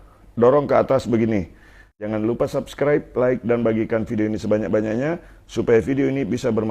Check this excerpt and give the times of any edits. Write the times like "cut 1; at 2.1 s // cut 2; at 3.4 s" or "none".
cut 1; at 2.1 s